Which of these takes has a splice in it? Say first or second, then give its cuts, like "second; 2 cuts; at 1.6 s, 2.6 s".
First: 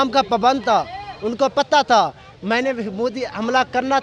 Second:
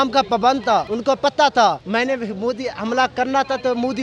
second; 2 cuts; at 0.9 s, 1.8 s